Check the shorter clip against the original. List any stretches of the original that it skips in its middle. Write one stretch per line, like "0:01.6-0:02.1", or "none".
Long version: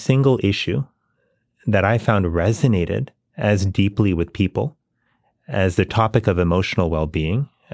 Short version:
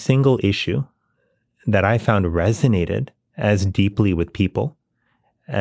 none